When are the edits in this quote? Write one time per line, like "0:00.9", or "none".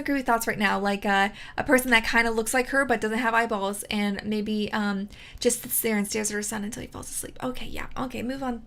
none